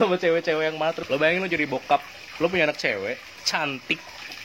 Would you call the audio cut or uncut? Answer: cut